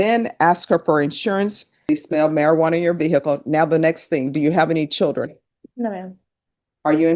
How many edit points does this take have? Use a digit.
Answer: 1